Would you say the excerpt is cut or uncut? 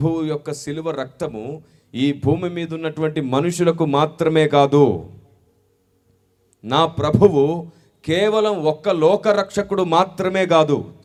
uncut